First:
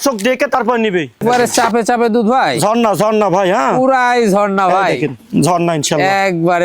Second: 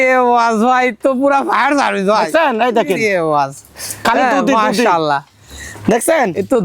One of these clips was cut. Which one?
first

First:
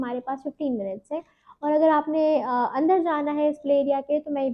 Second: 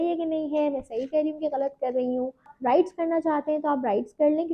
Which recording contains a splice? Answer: second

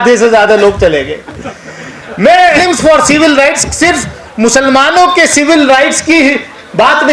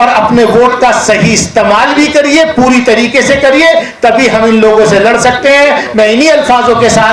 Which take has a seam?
first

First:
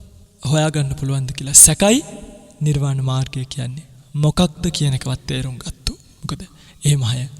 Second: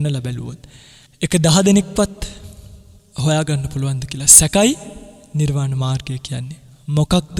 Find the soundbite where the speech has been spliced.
first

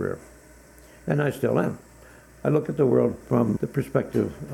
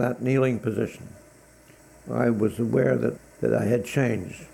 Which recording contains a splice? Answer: first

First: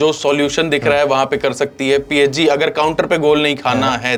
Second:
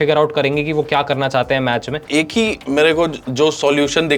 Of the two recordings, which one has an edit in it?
second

